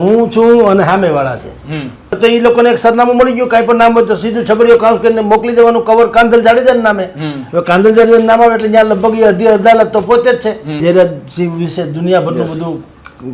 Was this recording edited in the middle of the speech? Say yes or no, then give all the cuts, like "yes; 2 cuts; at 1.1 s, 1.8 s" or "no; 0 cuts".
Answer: yes; 2 cuts; at 2.2 s, 10.8 s